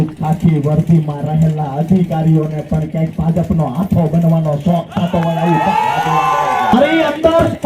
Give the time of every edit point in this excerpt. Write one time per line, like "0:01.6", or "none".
0:06.7